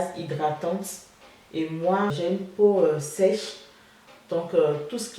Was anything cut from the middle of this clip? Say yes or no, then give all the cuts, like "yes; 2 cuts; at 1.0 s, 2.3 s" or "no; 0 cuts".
yes; 1 cut; at 2.1 s